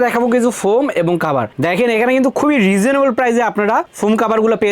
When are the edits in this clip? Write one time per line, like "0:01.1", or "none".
none